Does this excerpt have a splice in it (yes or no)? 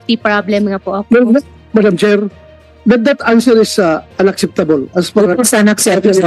no